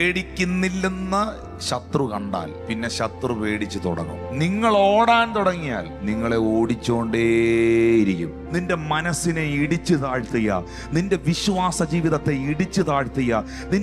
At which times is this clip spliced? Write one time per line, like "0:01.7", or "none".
0:02.6
0:04.2
0:05.9
0:08.4